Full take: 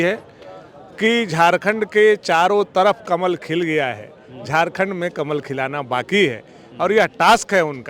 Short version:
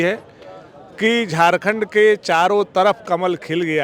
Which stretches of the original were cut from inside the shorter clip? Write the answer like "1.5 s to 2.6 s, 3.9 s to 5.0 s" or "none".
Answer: none